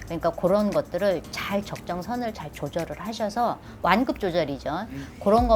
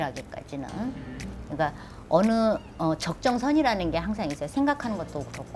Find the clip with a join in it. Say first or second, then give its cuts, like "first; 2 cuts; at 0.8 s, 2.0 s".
first; 1 cut; at 3.7 s